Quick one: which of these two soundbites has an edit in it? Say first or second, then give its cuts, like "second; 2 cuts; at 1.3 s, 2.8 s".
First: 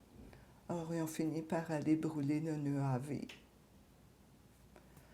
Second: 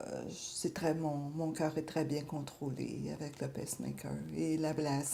first; 1 cut; at 3.1 s